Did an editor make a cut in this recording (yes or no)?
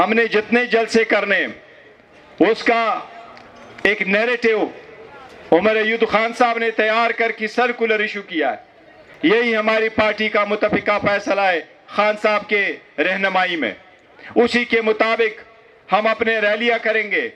no